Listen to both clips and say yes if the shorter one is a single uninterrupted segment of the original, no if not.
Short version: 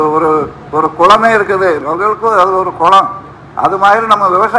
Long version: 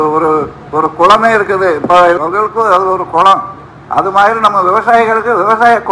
no